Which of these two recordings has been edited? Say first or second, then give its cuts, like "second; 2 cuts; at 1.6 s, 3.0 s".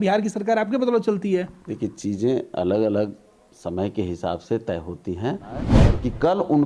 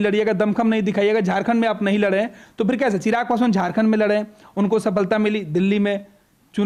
first; 1 cut; at 5.7 s